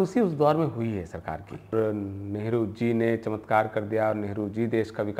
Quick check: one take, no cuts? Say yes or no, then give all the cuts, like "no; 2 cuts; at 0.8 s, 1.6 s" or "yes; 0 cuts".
no; 1 cut; at 1.7 s